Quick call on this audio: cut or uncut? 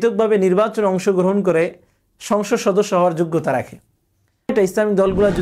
cut